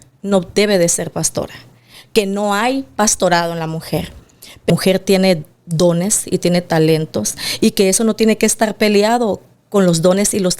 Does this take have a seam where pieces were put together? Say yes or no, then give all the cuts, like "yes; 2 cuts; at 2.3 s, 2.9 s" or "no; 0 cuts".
yes; 1 cut; at 4.7 s